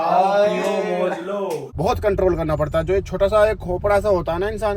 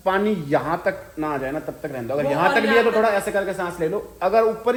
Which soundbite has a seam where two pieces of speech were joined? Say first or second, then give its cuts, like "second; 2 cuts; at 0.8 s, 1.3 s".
first; 1 cut; at 1.7 s